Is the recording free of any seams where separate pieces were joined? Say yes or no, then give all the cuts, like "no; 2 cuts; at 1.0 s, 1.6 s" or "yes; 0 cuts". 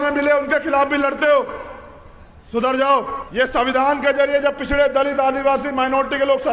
no; 1 cut; at 3.2 s